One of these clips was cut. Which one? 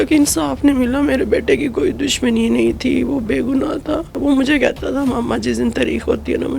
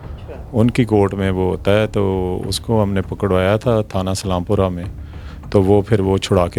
first; 1 cut; at 4.2 s

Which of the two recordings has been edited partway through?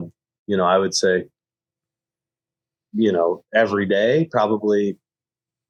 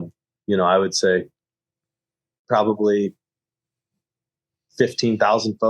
second; 1 cut; at 2.5 s

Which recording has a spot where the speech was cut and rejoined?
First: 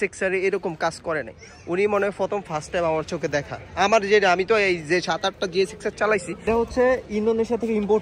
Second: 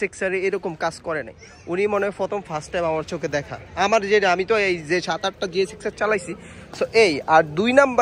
first; 1 cut; at 6.3 s

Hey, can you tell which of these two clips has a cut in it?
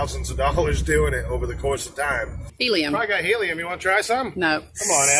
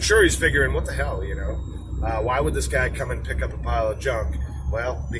first; 1 cut; at 2.5 s

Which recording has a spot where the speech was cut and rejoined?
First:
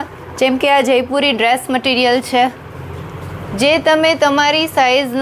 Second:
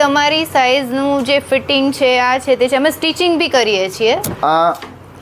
second; 1 cut; at 4.3 s

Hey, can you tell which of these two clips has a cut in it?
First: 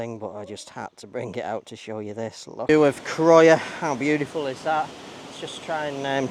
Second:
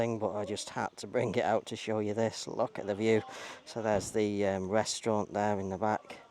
first; 1 cut; at 2.7 s

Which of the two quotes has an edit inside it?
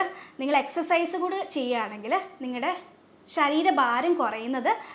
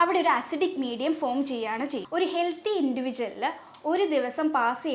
second; 1 cut; at 2.0 s

